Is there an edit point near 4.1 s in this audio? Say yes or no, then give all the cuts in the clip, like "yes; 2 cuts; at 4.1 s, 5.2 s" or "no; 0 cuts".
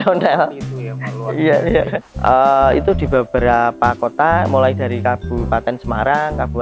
no; 1 cut; at 2.0 s